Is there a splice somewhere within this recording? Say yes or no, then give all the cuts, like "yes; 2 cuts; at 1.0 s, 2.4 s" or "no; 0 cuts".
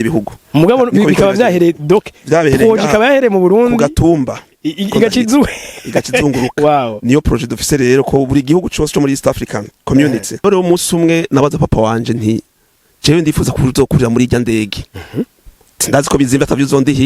yes; 1 cut; at 10.4 s